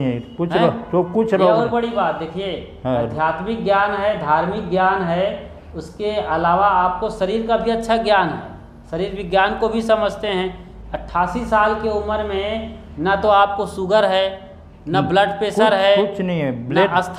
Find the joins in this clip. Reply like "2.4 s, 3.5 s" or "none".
none